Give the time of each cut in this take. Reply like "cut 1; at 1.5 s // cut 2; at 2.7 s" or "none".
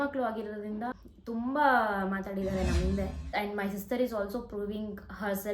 cut 1; at 1.1 s // cut 2; at 3.4 s